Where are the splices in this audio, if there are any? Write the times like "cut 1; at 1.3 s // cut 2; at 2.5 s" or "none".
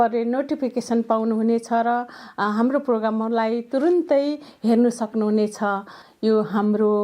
cut 1; at 6.0 s